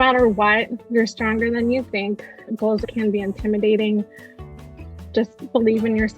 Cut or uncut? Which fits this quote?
cut